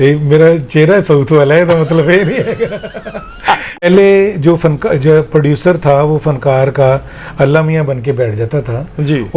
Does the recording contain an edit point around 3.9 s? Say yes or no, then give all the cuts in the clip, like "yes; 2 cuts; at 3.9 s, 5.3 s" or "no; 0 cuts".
yes; 1 cut; at 3.9 s